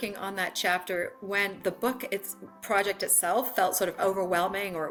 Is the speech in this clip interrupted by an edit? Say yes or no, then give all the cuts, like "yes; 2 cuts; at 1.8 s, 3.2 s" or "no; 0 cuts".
no; 0 cuts